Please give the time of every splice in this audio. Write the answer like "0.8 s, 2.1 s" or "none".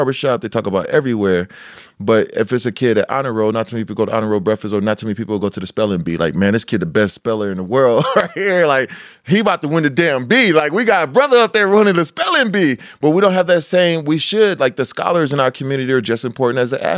none